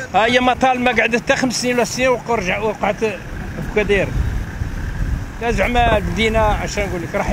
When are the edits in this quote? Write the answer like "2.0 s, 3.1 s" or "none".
none